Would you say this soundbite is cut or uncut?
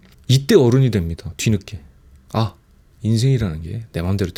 uncut